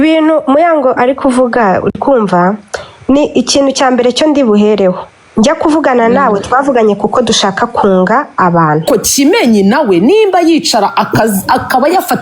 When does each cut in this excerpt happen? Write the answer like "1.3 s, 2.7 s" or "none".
8.8 s